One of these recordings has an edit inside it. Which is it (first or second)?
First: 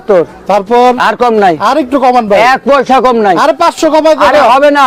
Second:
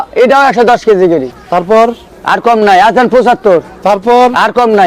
second